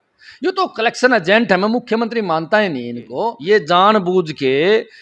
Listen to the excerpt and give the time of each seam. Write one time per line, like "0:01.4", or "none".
0:03.4

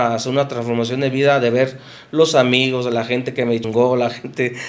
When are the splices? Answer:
0:03.7

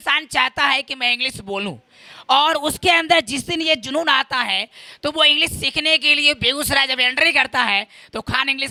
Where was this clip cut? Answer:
none

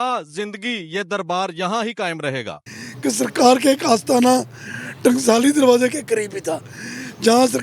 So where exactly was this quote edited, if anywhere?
0:02.6

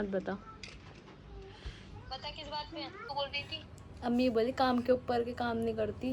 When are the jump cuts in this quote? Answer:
0:03.1

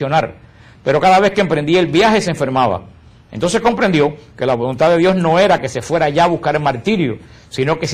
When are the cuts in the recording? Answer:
0:02.5

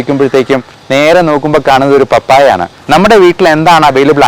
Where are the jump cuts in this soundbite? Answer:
0:02.7

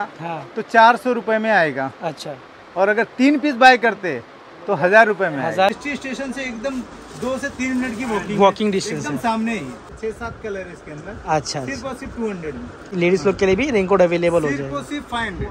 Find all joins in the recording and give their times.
0:05.7
0:10.0
0:12.9

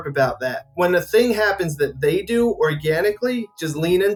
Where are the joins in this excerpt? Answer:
none

